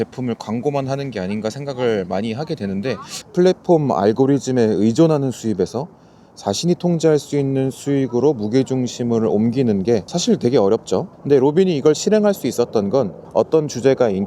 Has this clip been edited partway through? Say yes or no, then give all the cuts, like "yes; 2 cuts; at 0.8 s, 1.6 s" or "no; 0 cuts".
yes; 4 cuts; at 3.1 s, 10.1 s, 11.1 s, 13.2 s